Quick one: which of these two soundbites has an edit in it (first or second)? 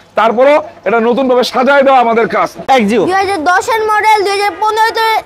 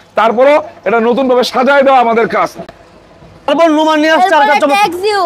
first